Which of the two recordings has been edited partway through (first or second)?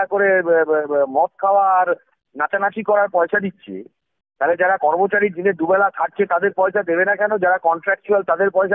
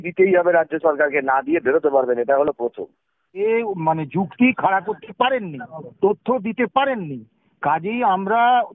second